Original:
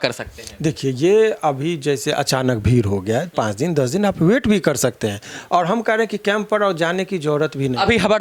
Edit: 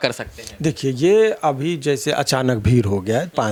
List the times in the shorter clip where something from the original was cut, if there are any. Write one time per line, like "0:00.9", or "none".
none